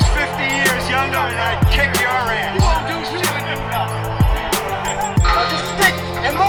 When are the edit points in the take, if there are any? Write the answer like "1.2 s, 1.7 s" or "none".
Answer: none